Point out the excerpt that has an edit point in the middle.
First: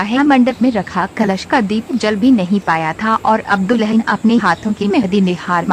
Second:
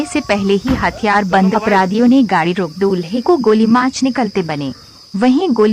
second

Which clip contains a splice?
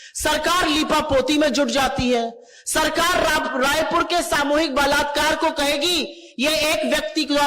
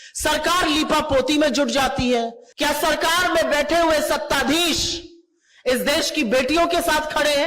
second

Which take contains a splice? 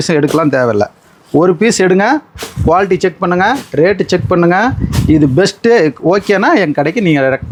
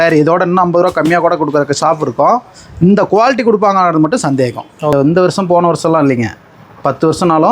second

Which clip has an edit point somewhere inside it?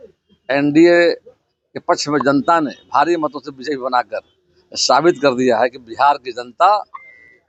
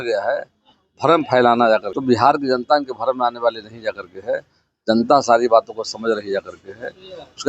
second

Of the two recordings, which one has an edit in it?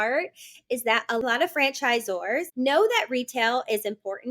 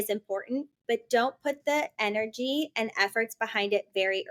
first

